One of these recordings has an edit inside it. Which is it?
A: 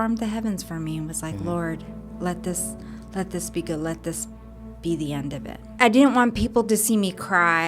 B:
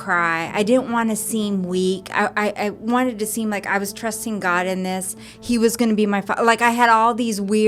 A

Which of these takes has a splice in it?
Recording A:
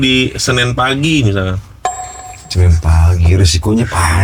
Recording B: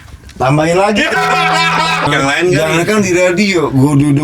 B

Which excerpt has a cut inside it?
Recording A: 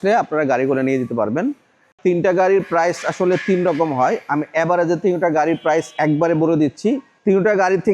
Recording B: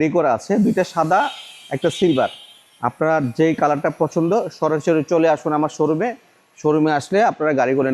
A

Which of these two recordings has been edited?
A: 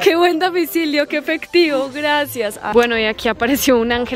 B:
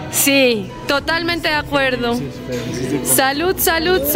A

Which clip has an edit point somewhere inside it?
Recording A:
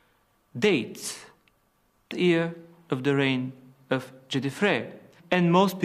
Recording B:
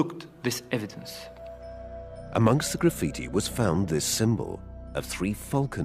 A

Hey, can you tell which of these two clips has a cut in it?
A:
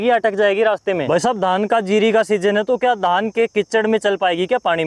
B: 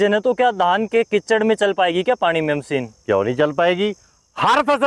A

